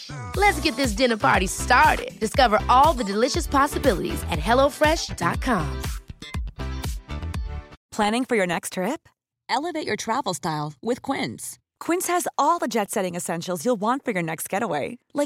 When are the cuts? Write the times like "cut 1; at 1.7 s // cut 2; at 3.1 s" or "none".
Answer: cut 1; at 7.8 s